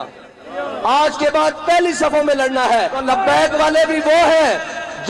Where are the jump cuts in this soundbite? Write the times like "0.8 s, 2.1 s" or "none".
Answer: 3.0 s